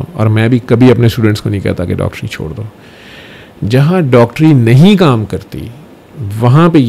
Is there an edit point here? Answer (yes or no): no